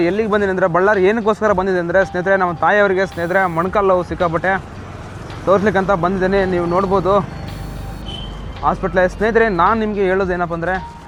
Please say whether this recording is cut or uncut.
uncut